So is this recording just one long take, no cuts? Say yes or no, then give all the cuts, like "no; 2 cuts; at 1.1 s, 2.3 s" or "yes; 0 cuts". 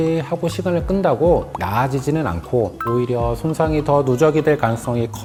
yes; 0 cuts